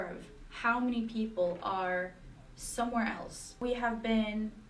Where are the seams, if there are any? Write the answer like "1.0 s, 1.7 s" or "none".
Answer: 3.6 s